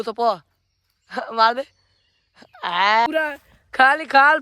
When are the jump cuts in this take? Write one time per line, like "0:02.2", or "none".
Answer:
0:03.1